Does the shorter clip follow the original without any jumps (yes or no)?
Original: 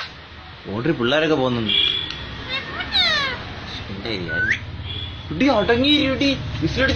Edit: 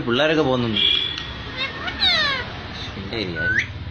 yes